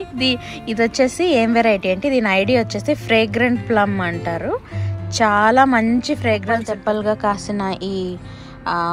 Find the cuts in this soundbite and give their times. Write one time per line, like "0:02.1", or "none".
0:06.6

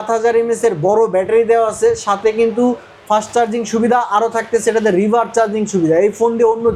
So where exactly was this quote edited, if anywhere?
none

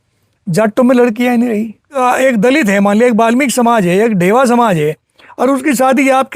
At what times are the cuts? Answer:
0:01.9

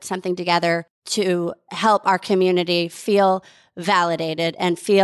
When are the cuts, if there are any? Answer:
0:01.0

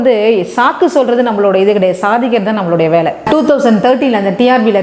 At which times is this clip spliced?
0:03.2

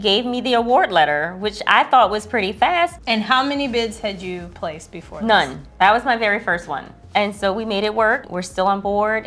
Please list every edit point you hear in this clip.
0:03.0
0:06.9
0:08.3

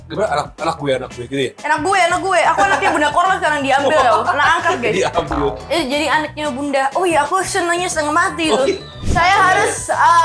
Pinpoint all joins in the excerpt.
0:05.6
0:08.9

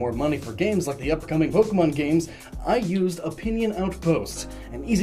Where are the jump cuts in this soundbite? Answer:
0:01.7

